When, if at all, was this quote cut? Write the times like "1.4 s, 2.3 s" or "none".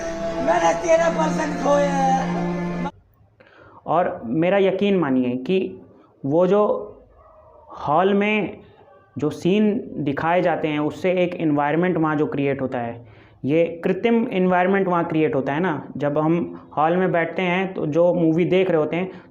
2.9 s